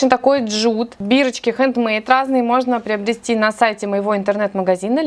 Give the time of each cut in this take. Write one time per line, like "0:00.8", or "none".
none